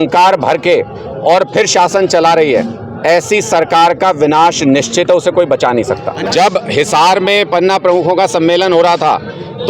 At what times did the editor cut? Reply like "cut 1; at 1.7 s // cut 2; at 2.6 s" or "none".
cut 1; at 6.1 s

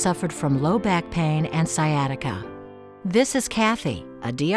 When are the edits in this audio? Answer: cut 1; at 2.4 s

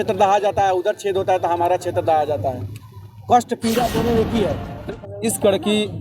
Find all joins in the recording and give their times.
cut 1; at 4.9 s

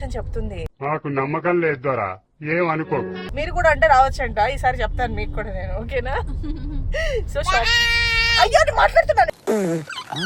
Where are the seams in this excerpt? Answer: cut 1; at 3.2 s

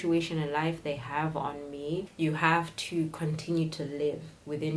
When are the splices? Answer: cut 1; at 2.1 s

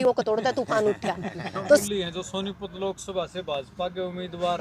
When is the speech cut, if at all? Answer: cut 1; at 1.9 s

